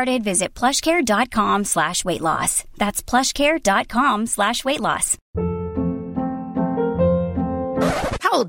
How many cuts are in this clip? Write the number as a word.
one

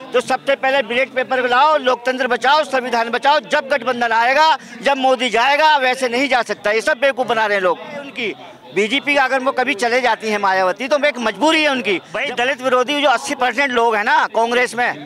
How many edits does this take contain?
two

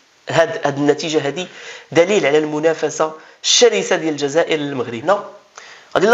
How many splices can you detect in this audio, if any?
one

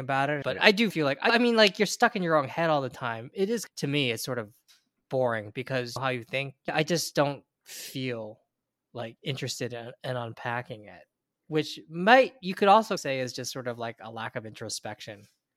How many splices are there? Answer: zero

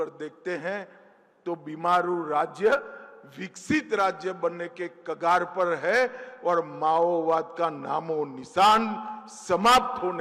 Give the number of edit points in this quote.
zero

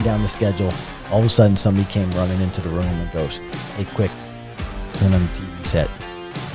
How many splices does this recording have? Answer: zero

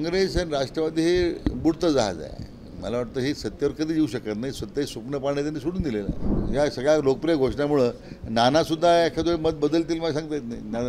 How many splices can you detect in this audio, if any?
one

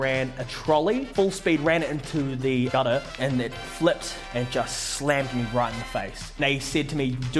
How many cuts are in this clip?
four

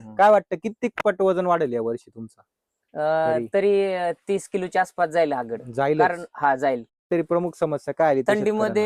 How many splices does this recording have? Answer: one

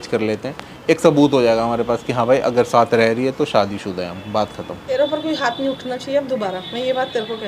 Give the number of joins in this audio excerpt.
one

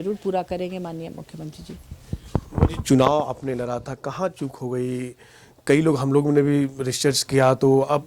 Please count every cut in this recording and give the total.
zero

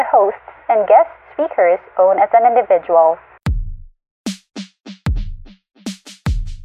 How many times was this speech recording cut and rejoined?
one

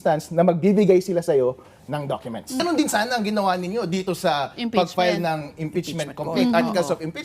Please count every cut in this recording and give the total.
one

